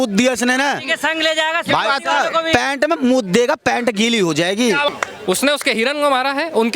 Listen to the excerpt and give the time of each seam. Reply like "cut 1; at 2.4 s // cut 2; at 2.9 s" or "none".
cut 1; at 4.9 s